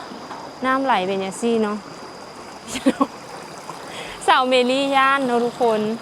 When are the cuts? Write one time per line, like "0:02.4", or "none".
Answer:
none